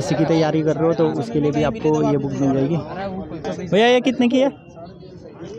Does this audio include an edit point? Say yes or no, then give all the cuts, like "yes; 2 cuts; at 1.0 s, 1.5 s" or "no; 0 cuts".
yes; 1 cut; at 3.4 s